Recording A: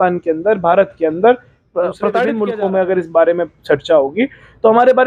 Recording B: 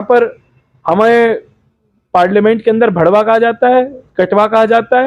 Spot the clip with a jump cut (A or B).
A